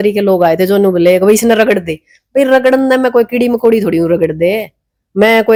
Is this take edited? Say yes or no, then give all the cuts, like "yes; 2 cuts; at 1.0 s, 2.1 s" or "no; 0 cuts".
no; 0 cuts